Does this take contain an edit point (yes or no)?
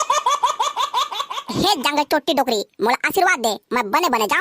yes